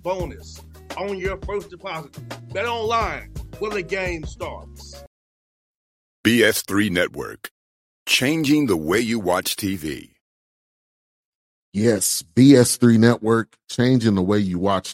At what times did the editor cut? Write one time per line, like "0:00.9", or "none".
0:05.0